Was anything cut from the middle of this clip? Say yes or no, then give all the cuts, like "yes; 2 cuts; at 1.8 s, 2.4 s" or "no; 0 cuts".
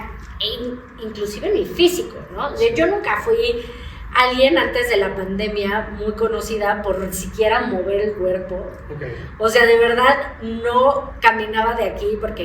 no; 0 cuts